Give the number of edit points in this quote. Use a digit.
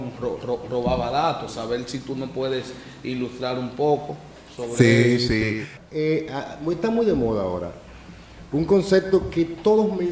1